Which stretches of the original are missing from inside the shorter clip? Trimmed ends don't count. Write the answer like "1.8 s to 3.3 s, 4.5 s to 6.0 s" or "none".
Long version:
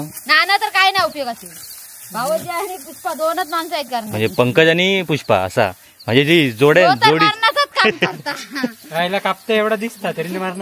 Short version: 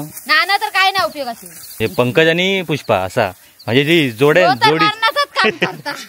1.7 s to 4.1 s